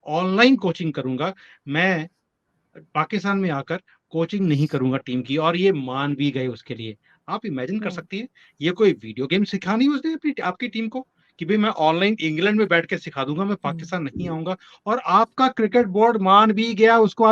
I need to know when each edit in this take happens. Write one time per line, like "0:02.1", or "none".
none